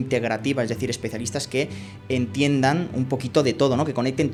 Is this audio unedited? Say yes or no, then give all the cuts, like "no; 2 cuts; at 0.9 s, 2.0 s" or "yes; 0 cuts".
yes; 0 cuts